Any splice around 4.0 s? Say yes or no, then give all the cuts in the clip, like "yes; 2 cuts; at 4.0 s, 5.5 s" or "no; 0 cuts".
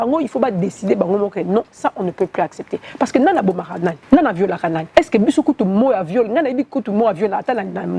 yes; 2 cuts; at 4.0 s, 4.8 s